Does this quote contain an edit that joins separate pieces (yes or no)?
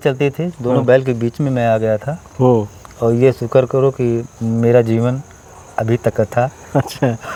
no